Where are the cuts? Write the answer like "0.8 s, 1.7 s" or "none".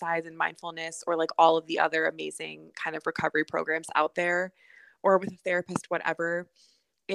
none

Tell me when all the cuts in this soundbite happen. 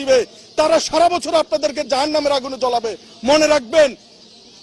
none

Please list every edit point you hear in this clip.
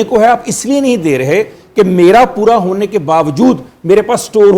none

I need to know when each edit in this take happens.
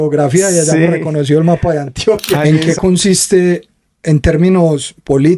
2.4 s

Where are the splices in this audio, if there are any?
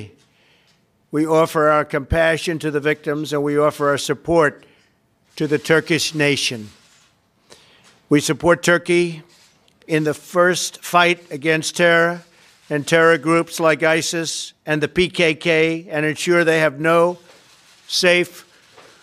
2.1 s

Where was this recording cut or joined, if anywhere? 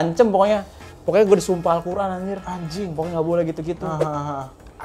none

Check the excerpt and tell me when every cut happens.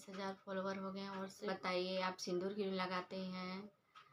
1.5 s

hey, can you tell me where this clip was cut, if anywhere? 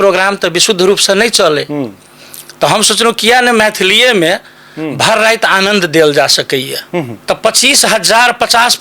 7.1 s

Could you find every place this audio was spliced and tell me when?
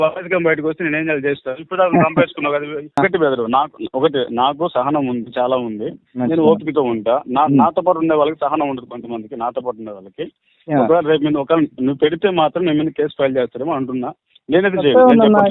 3.0 s

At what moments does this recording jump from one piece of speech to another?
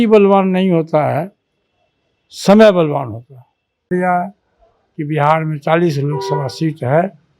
3.9 s

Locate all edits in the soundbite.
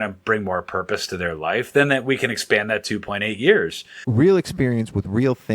4.0 s

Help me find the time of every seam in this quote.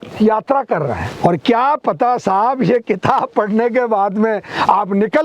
1.1 s

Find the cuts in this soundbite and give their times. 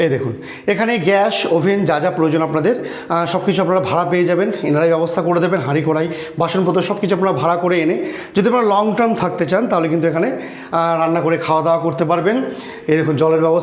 none

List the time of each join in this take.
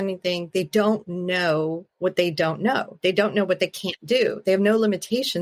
none

